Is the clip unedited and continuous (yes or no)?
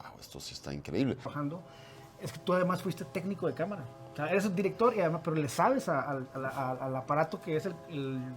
no